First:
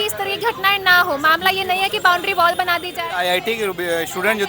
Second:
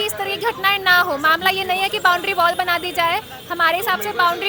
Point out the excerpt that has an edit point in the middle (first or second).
first